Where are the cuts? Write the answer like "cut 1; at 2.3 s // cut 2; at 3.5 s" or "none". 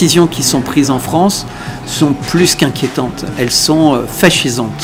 none